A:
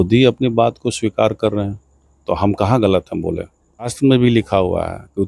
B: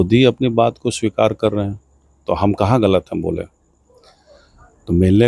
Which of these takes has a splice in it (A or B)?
A